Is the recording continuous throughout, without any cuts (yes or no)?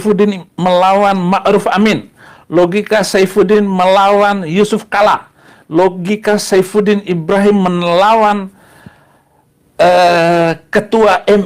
yes